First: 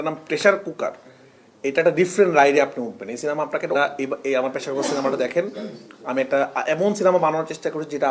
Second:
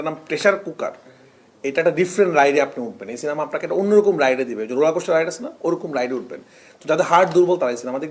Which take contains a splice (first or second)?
first